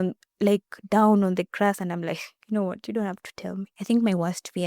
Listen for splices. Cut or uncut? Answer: cut